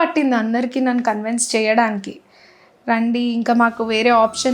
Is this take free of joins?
yes; 0 cuts

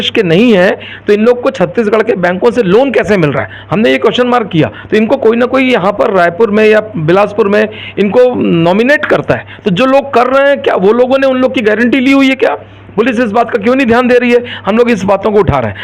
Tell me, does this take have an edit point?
no; 0 cuts

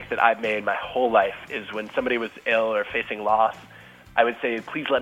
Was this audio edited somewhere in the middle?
no; 0 cuts

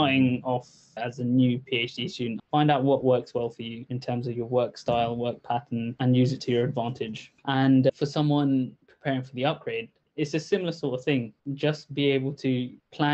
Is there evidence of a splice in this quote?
yes; 1 cut; at 2.5 s

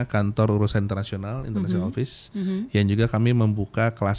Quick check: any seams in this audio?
no; 0 cuts

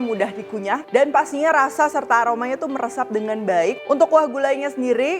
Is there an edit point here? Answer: yes; 2 cuts; at 0.8 s, 3.8 s

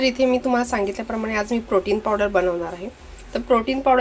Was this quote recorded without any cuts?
yes; 0 cuts

